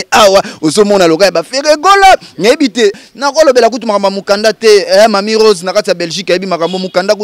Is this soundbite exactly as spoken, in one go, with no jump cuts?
no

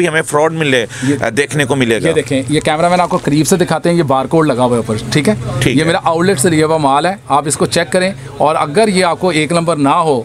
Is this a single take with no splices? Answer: yes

